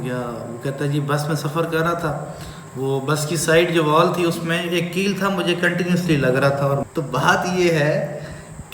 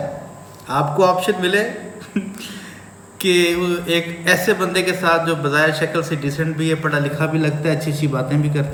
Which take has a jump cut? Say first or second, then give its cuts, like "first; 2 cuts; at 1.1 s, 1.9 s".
first; 1 cut; at 6.8 s